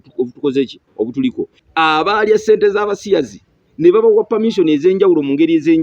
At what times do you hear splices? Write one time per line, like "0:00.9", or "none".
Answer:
0:01.6